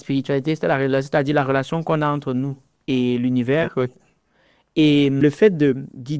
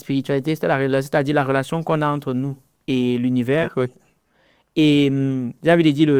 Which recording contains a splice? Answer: first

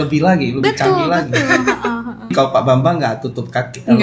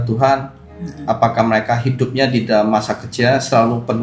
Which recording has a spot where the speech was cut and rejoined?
first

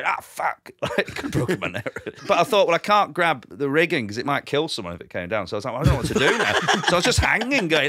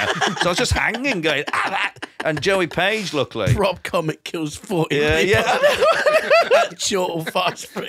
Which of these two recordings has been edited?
first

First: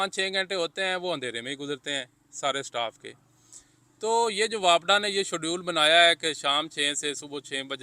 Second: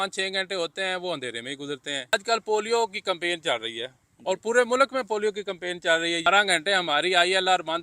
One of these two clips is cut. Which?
second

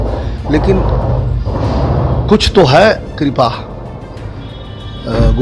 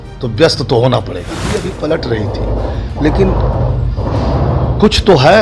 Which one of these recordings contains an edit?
second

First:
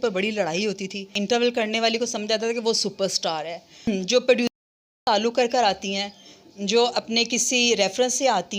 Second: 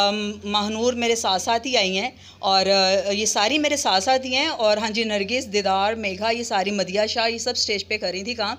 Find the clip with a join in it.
first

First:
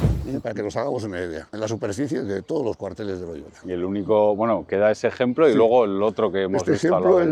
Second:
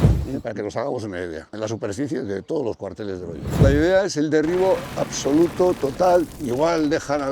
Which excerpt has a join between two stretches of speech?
second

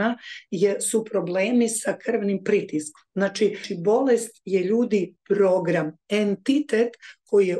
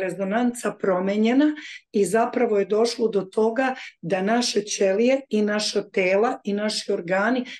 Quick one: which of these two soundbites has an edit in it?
first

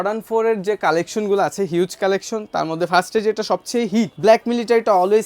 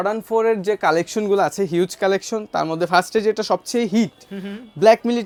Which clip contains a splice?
first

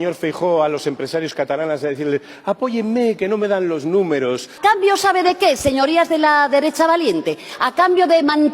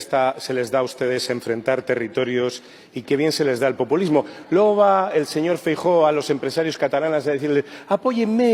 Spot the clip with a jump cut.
first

